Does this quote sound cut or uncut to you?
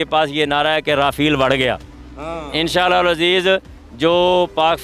uncut